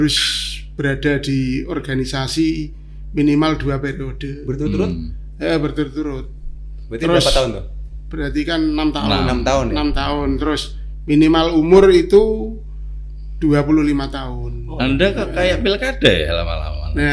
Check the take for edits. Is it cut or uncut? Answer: uncut